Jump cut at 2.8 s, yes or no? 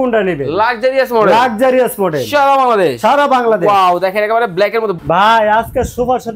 no